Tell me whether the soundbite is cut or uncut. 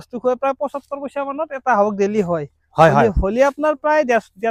uncut